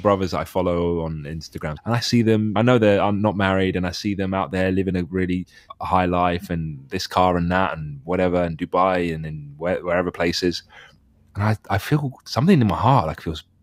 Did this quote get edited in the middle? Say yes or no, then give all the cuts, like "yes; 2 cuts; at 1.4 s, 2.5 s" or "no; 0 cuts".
yes; 3 cuts; at 1.7 s, 2.5 s, 5.6 s